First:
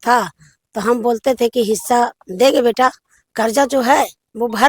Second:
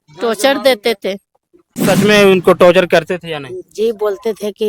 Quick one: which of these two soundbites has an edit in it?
second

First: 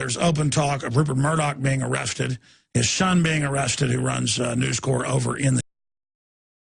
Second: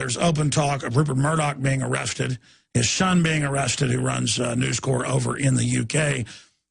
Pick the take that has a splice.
second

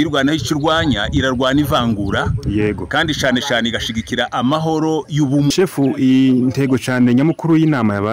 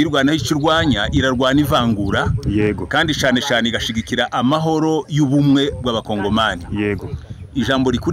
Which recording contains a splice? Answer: first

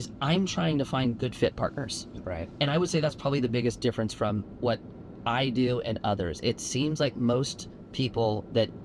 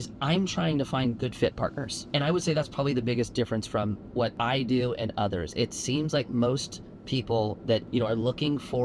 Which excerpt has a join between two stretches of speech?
second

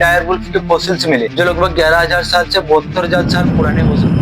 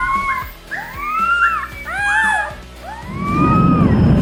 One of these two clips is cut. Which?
first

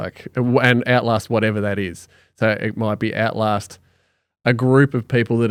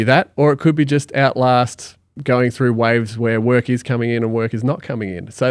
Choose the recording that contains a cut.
second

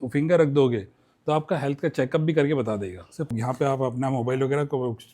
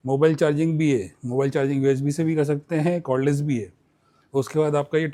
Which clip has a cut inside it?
first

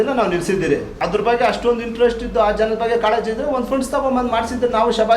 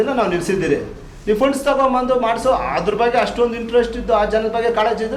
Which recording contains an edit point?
first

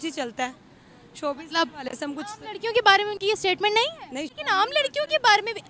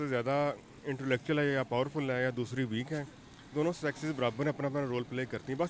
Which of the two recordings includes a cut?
first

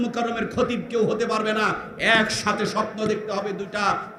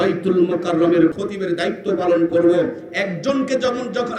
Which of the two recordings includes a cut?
second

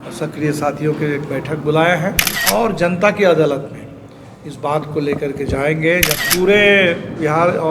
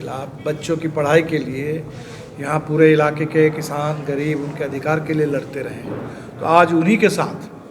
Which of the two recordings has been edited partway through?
first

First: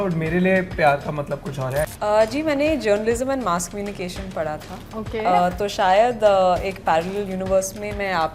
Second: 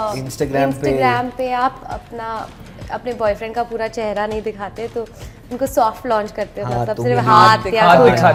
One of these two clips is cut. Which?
first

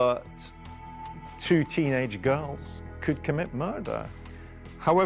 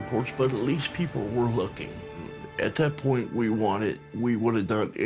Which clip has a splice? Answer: second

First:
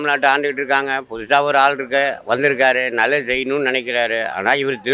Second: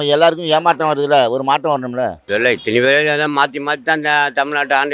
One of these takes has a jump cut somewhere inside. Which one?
second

